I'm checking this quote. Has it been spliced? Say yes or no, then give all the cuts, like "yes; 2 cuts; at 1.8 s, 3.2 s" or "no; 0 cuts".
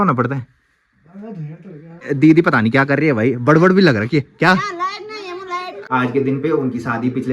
yes; 2 cuts; at 2.1 s, 5.8 s